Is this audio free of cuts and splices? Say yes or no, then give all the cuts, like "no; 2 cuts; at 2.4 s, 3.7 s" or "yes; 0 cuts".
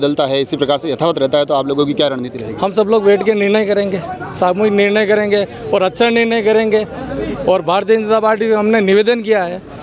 yes; 0 cuts